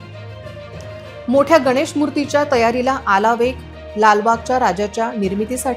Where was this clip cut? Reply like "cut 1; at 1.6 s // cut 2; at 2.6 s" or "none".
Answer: cut 1; at 1.0 s